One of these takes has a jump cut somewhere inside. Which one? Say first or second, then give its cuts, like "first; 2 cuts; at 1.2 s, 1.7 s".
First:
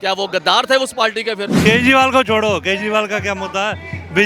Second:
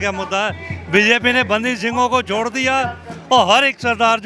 first; 1 cut; at 1.5 s